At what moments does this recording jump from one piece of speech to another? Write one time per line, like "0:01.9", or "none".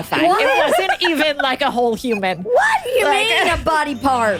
none